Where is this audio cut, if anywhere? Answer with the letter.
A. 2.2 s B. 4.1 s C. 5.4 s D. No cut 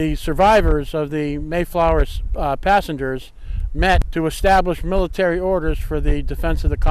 B